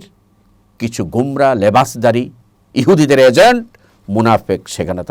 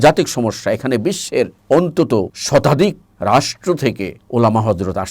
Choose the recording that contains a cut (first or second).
second